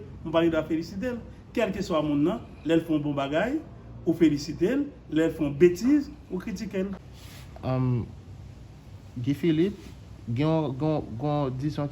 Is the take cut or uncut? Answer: cut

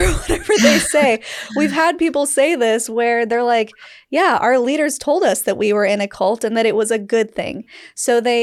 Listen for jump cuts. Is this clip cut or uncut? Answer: uncut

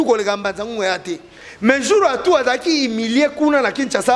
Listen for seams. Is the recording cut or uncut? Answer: uncut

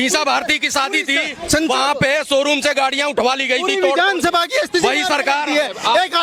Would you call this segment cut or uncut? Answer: uncut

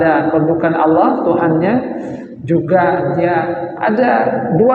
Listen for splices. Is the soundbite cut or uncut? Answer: uncut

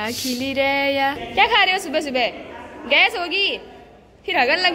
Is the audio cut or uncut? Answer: cut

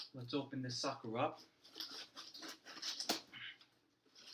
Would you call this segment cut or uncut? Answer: cut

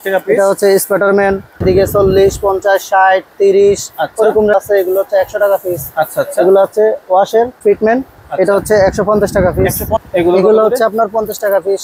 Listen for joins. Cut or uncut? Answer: cut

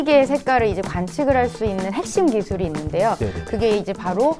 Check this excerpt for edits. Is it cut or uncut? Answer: uncut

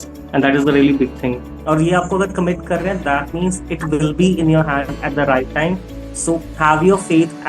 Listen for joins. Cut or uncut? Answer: cut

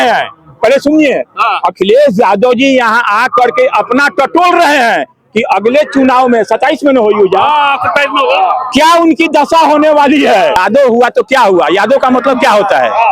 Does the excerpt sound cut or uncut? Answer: cut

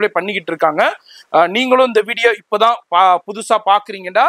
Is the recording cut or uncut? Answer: uncut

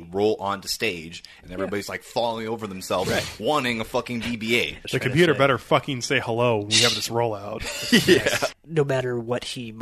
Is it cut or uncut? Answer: cut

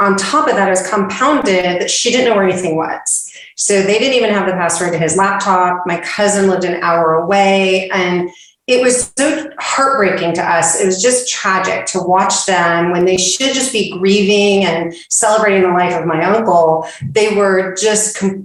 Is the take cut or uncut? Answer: uncut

